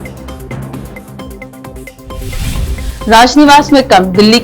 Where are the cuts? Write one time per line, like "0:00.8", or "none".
0:01.9